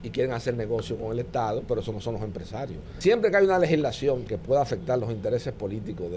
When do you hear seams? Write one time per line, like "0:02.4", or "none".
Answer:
0:02.9
0:04.2